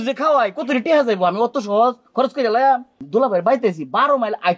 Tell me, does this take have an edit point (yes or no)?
yes